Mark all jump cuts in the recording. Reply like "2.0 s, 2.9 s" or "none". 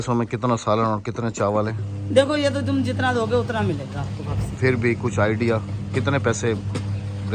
none